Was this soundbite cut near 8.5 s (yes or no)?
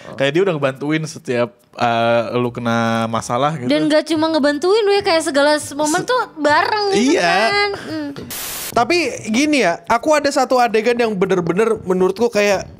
yes